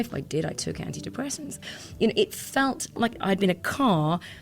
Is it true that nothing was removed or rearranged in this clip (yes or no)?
no